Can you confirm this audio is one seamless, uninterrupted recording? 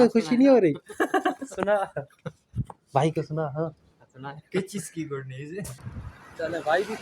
no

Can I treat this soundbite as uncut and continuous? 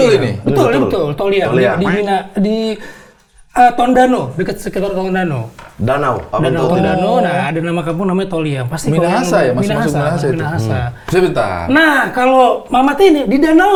yes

